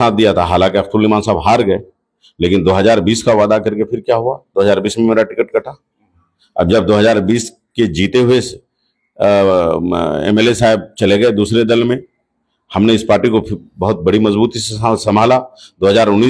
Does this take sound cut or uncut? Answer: uncut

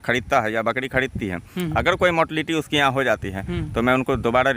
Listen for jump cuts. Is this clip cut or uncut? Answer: uncut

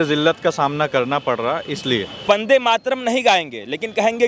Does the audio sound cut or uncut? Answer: cut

